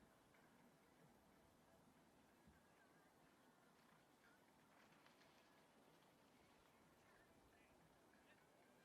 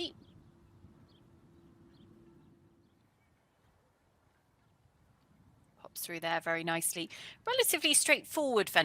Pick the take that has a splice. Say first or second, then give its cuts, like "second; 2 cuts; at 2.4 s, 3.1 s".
second; 1 cut; at 2.8 s